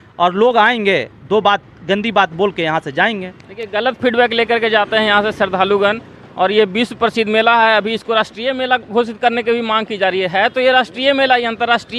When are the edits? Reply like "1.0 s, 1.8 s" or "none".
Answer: none